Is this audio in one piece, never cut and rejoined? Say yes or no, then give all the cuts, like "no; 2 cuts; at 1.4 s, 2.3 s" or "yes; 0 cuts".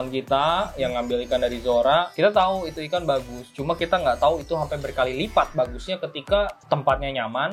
yes; 0 cuts